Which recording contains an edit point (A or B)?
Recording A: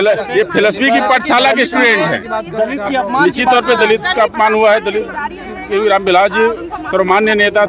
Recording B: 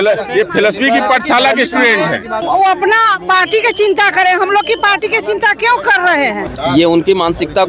B